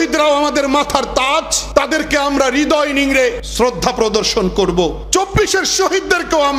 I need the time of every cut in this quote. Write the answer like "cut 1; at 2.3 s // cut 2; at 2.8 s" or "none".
cut 1; at 1.6 s // cut 2; at 3.4 s // cut 3; at 5.0 s